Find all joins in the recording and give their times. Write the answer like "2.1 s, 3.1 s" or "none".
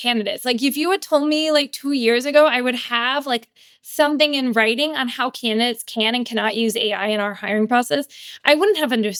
none

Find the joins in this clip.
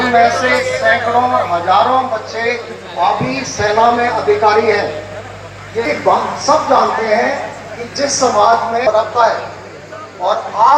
5.8 s

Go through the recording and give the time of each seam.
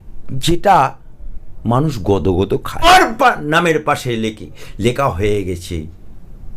2.8 s

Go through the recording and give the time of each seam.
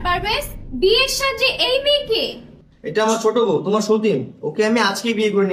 none

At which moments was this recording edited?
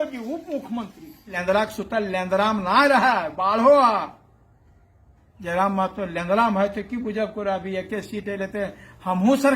1.4 s

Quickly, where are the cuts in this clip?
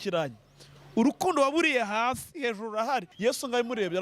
3.1 s

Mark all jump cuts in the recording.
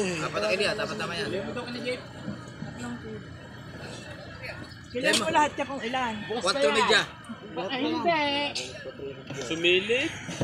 none

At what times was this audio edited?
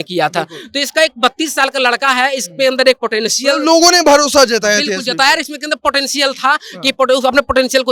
none

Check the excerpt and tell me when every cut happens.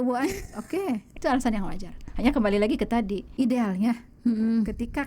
1.1 s, 3.2 s

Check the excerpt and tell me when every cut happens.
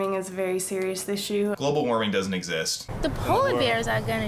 1.6 s, 2.8 s

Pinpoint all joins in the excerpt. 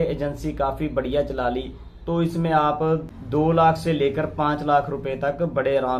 none

